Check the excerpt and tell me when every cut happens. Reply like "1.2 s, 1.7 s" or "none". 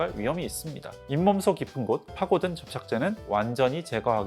0.9 s, 2.1 s